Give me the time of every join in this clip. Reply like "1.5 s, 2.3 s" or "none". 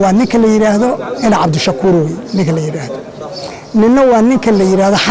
none